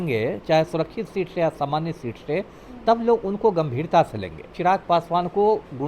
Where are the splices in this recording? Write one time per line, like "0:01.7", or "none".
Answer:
0:04.5

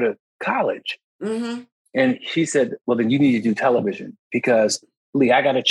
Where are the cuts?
none

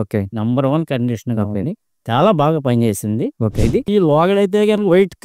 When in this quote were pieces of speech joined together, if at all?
0:03.9

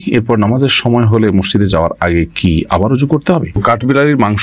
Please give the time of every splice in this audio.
0:03.4

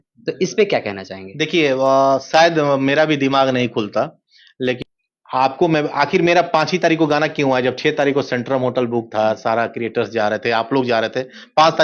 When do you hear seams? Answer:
0:04.8

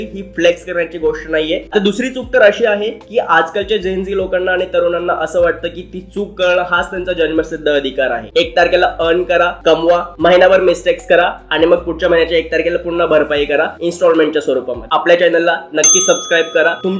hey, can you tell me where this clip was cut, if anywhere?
0:01.6
0:08.2
0:14.8

